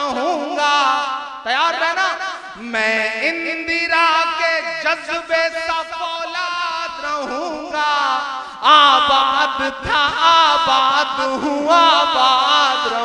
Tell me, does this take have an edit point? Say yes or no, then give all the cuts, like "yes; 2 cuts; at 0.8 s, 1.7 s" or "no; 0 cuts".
no; 0 cuts